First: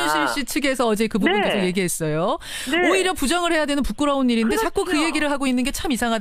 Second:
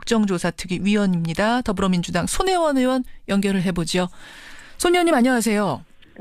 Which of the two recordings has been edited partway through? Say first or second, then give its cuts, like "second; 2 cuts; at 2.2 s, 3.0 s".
second; 1 cut; at 2.1 s